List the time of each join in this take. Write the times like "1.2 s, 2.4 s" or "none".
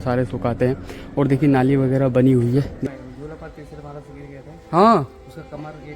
2.8 s